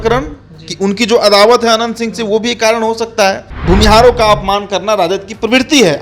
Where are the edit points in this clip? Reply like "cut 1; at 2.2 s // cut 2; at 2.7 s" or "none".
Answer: cut 1; at 3.5 s